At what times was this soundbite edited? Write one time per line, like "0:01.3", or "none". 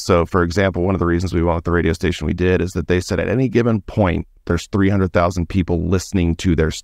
none